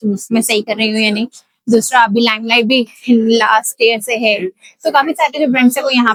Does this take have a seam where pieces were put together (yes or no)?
no